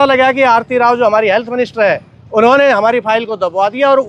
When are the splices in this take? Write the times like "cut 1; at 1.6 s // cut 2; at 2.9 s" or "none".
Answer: none